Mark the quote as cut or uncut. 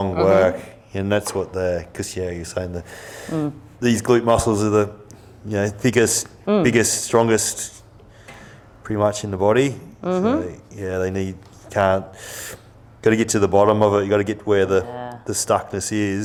uncut